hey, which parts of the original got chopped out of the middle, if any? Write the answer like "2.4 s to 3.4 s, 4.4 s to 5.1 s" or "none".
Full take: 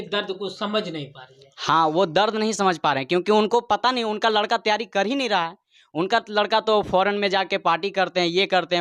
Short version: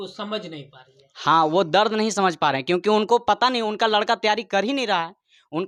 none